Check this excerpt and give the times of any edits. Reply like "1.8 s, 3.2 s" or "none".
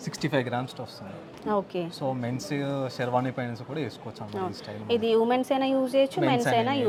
none